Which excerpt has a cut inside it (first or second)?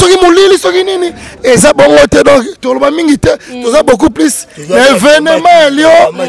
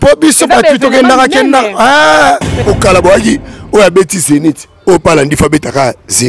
second